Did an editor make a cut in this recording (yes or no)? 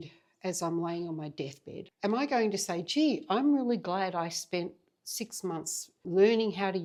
no